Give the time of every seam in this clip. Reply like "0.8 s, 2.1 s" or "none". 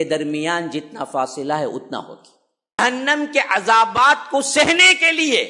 2.8 s